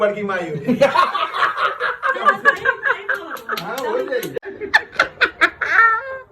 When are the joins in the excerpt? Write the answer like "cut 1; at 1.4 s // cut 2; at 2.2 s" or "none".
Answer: cut 1; at 4.3 s